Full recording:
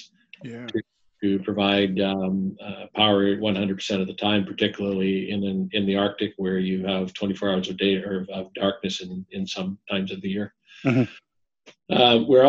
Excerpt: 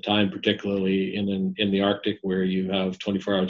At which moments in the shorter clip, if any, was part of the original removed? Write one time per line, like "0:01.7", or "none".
none